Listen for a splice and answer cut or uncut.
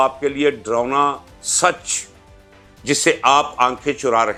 uncut